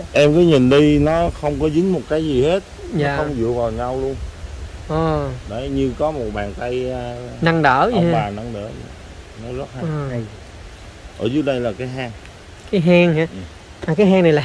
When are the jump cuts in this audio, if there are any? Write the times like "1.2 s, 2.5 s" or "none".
none